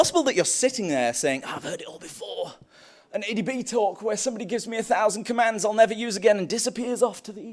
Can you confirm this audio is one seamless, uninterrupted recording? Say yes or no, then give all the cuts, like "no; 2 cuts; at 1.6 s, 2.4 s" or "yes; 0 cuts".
yes; 0 cuts